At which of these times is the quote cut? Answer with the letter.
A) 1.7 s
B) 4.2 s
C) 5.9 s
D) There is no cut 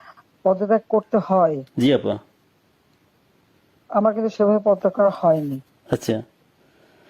D